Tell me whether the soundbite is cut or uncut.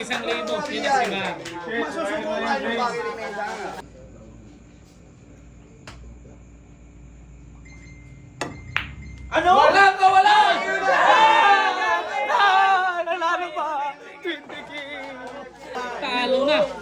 cut